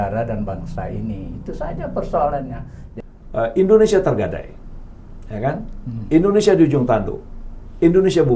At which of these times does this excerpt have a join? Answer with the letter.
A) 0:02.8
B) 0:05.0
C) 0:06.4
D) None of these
A